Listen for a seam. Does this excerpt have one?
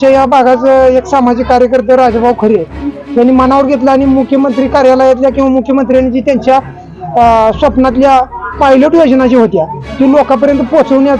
no; 0 cuts

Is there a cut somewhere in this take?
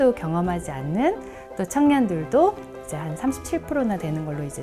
no; 0 cuts

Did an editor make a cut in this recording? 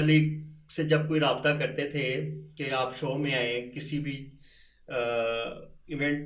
no; 0 cuts

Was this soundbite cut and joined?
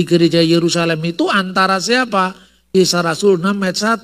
no; 0 cuts

